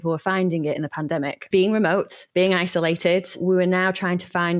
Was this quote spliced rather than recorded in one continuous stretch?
yes; 3 cuts; at 1.5 s, 2.2 s, 3.4 s

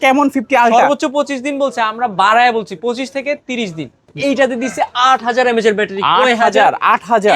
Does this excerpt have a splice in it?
yes; 1 cut; at 4.1 s

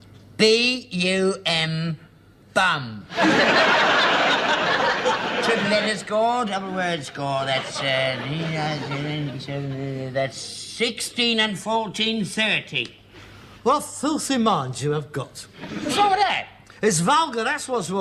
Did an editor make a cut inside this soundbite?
no; 0 cuts

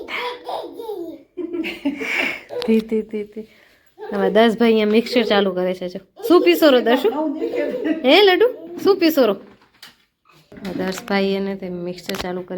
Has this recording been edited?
no; 0 cuts

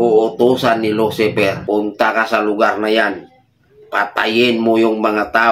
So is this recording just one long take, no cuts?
no; 1 cut; at 1.6 s

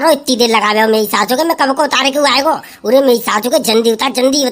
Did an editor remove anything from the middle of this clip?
no; 0 cuts

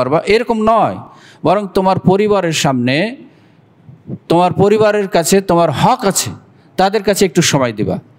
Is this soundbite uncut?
yes; 0 cuts

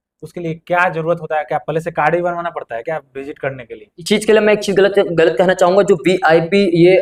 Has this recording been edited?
no; 0 cuts

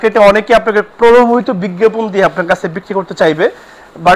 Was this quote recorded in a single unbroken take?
yes; 0 cuts

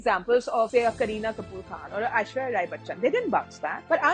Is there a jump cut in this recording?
no; 0 cuts

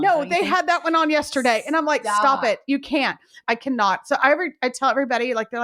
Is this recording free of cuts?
no; 1 cut; at 3.4 s

